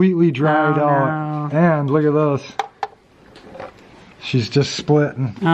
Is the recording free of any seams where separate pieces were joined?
yes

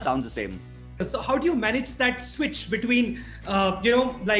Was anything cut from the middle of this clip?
yes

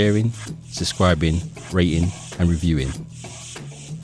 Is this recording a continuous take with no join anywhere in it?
no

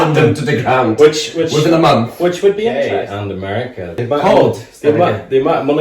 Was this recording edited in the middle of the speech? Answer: yes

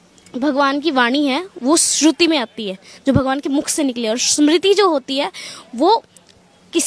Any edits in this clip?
no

